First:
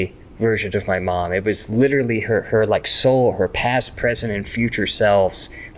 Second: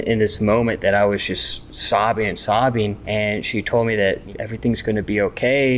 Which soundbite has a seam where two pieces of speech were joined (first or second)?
second